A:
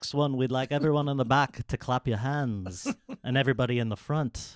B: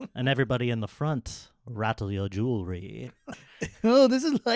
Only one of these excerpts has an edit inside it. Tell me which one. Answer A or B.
B